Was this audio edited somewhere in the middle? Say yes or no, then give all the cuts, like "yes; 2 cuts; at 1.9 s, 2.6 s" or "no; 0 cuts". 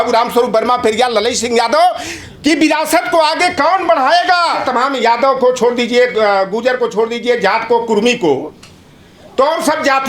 yes; 1 cut; at 4.7 s